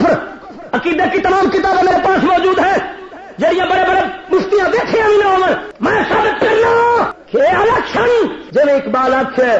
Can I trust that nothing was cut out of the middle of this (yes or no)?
no